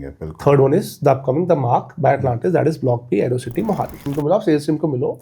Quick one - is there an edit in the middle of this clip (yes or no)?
yes